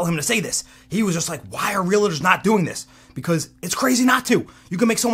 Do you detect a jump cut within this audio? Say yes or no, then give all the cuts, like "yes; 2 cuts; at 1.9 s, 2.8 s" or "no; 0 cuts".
no; 0 cuts